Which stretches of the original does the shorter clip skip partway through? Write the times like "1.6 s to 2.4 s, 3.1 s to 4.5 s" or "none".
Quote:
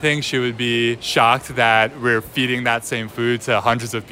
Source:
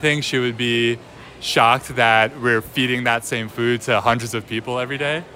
1.0 s to 1.4 s